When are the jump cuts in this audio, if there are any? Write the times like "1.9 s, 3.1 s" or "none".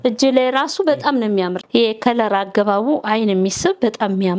1.6 s